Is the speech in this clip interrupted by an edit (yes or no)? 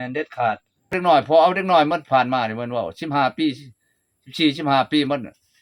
yes